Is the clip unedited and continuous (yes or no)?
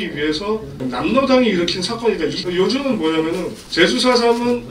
no